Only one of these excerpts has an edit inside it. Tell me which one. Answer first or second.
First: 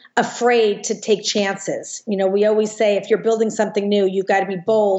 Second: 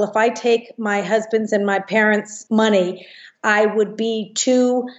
second